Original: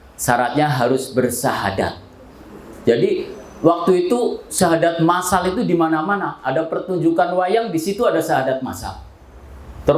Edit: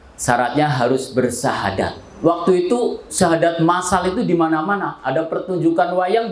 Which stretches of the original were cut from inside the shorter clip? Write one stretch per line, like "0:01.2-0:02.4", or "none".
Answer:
0:02.0-0:03.4